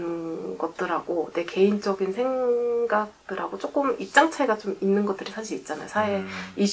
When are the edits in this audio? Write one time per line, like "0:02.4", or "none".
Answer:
none